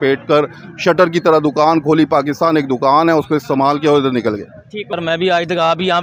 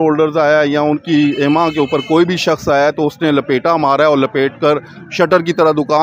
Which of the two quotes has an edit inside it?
first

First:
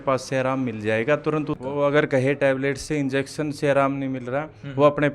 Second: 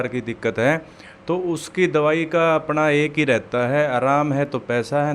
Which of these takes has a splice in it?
first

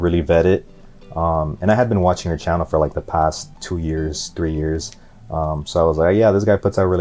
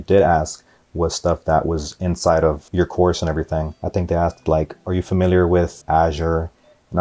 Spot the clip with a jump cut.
second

